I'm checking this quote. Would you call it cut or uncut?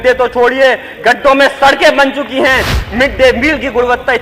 cut